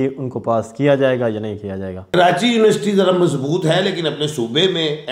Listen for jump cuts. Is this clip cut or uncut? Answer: cut